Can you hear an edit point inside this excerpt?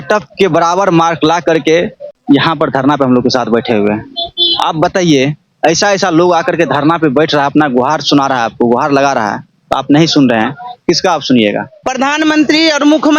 yes; 2 cuts; at 2.1 s, 11.8 s

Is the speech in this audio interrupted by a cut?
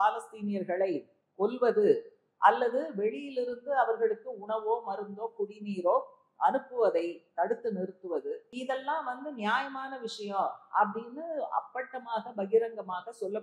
yes; 1 cut; at 8.5 s

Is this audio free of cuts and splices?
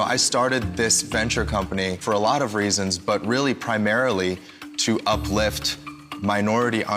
yes; 0 cuts

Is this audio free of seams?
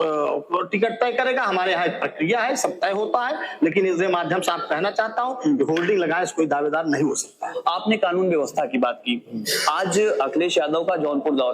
yes; 0 cuts

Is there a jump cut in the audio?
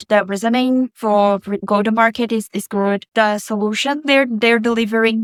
no; 0 cuts

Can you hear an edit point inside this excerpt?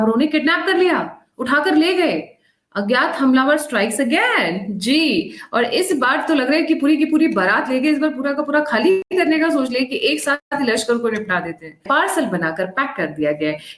yes; 3 cuts; at 9.1 s, 10.5 s, 11.8 s

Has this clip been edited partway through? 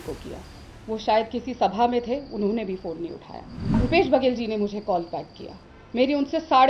yes; 1 cut; at 3.8 s

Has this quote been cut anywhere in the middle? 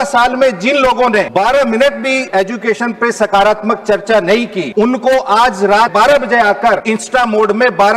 yes; 5 cuts; at 1.3 s, 2.3 s, 4.6 s, 5.9 s, 6.8 s

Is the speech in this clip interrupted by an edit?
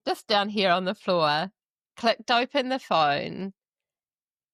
no; 0 cuts

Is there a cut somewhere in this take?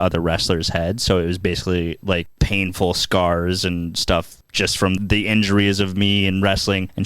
yes; 2 cuts; at 1.4 s, 5.0 s

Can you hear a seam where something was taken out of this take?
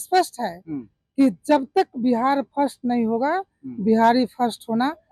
no; 0 cuts

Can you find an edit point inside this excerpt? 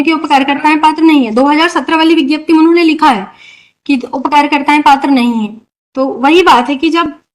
no; 0 cuts

